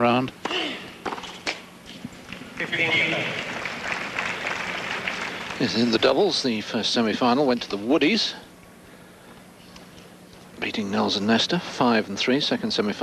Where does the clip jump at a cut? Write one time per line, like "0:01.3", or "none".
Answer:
0:00.9